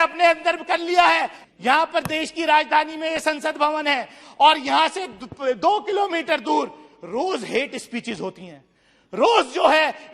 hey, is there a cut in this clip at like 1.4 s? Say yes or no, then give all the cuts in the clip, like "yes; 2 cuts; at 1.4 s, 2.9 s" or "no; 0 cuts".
yes; 1 cut; at 1.4 s